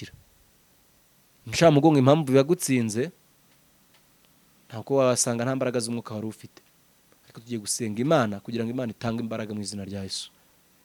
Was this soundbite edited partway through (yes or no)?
no